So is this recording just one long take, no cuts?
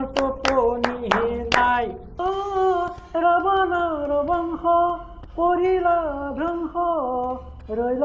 no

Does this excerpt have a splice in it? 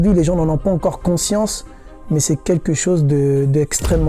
no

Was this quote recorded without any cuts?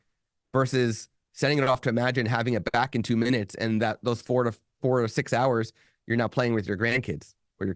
yes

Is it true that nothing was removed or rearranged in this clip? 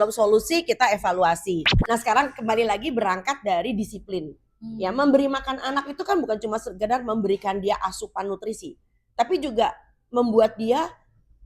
no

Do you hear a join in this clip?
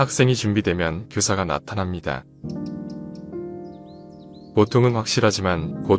no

